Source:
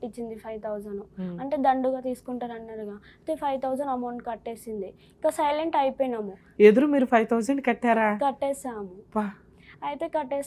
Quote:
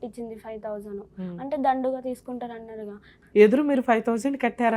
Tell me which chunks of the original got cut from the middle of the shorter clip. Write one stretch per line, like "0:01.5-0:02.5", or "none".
0:03.1-0:06.3